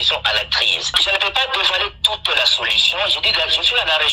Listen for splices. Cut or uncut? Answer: cut